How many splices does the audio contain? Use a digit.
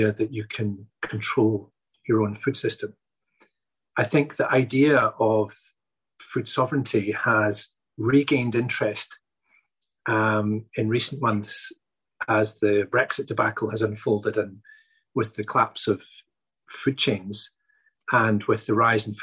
1